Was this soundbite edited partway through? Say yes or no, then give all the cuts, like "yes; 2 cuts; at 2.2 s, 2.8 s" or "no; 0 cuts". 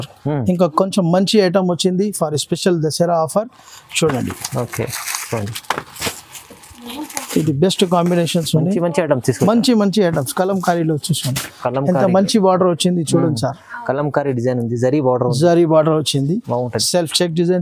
no; 0 cuts